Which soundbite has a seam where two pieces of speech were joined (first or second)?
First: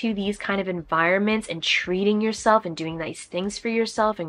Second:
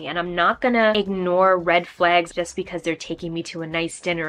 second